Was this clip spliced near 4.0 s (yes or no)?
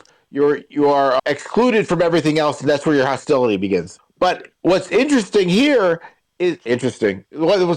yes